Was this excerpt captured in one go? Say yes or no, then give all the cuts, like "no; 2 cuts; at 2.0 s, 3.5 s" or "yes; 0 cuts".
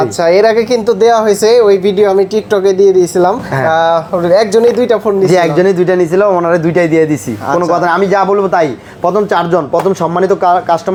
yes; 0 cuts